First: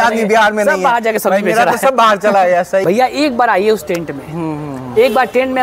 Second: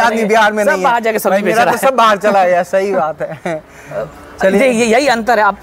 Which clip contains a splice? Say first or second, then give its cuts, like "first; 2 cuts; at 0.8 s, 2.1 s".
first; 1 cut; at 2.8 s